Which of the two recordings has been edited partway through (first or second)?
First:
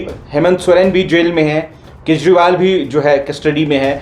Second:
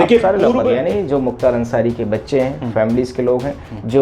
second